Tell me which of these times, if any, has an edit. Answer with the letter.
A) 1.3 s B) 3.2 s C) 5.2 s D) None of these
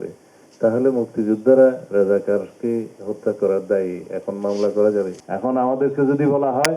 C